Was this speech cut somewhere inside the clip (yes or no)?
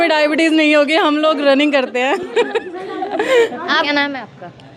no